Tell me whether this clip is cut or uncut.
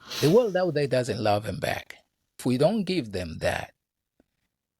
cut